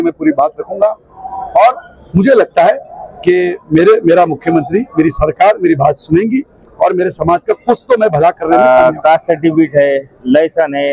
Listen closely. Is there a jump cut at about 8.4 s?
yes; 1 cut; at 8.4 s

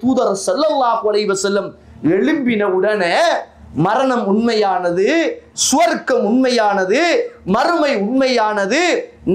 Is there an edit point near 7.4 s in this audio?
no; 0 cuts

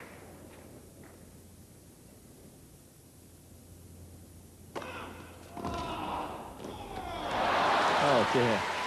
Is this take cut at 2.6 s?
yes; 1 cut; at 2.6 s

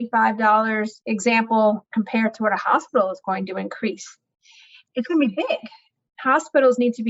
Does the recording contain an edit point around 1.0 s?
yes; 4 cuts; at 1.0 s, 1.8 s, 4.8 s, 5.9 s

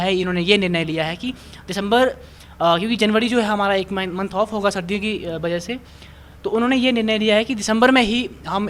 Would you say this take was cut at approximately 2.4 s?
no; 0 cuts

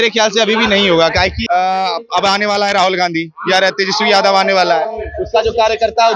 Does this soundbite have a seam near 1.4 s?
yes; 1 cut; at 1.4 s

